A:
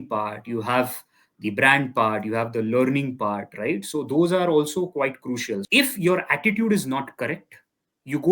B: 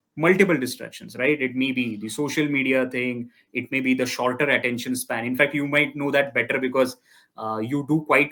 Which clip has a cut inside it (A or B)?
A